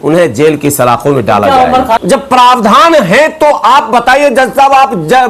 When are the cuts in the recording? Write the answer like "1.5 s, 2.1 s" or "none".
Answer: 2.0 s